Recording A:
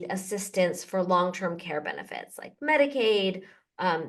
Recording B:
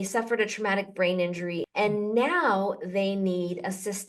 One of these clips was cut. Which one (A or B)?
B